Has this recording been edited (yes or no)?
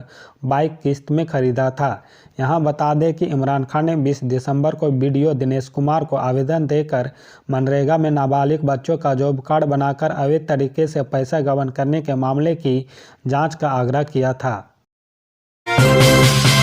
yes